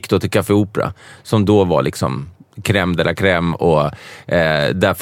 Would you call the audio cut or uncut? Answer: uncut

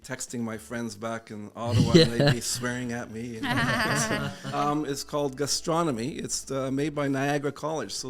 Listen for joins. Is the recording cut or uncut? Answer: cut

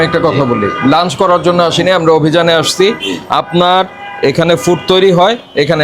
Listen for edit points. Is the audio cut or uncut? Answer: uncut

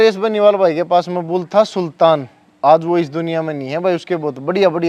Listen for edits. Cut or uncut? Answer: uncut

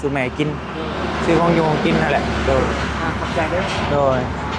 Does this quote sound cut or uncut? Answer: uncut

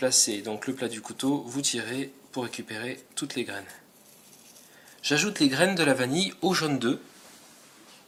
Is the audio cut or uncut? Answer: uncut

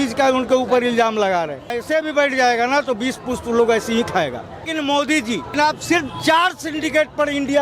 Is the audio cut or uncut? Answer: cut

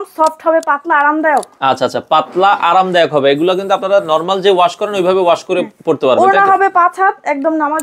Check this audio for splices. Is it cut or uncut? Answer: uncut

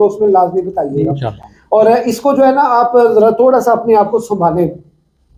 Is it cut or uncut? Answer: uncut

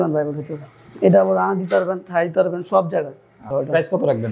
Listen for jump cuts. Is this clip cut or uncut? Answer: cut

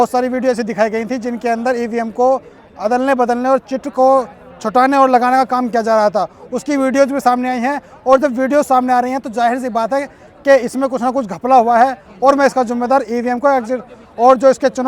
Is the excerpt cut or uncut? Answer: uncut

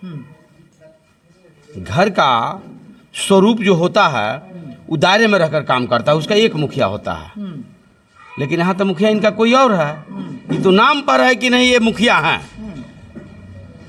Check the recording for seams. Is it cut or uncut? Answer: uncut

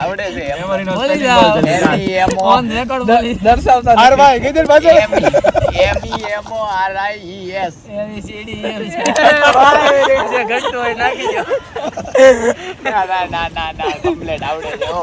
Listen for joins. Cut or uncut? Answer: uncut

